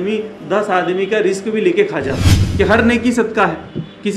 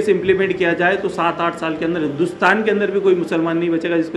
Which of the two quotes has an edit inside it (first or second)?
first